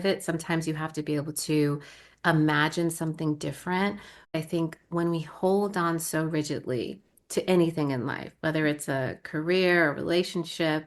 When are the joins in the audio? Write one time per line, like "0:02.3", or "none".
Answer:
0:04.3